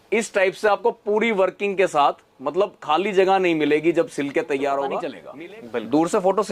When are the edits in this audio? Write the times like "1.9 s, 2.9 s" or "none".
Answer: 5.2 s